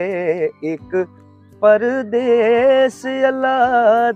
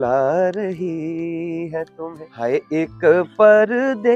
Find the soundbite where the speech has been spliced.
second; 1 cut; at 2.2 s

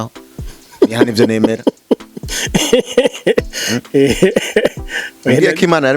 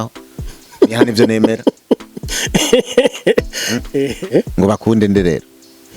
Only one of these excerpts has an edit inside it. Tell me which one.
second; 1 cut; at 4.0 s

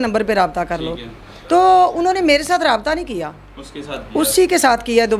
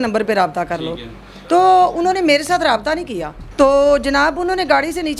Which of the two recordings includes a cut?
second; 1 cut; at 3.4 s

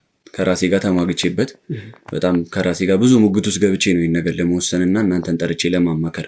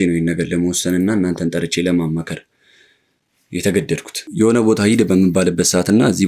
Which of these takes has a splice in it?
second; 1 cut; at 4.1 s

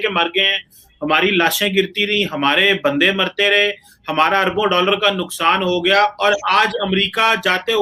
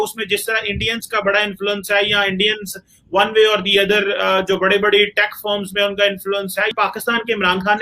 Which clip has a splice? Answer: second; 1 cut; at 6.7 s

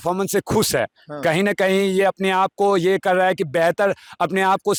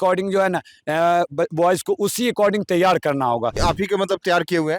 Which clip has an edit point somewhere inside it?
second; 1 cut; at 3.6 s

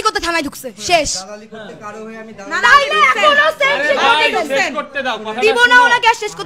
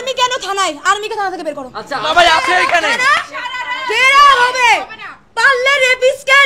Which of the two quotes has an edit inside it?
second; 1 cut; at 2.1 s

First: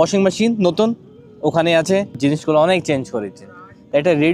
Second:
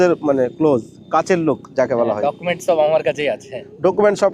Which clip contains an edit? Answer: first; 1 cut; at 2.1 s

